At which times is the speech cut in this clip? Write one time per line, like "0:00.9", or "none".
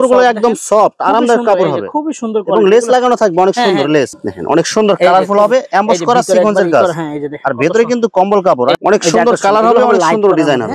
0:04.1
0:08.8